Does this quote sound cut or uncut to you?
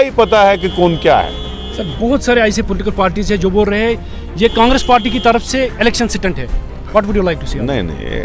uncut